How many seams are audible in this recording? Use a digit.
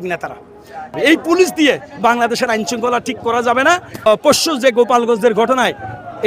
2